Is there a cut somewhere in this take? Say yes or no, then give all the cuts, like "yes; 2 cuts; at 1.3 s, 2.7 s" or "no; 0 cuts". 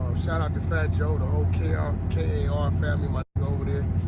no; 0 cuts